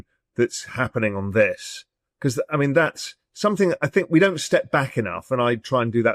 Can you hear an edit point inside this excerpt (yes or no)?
no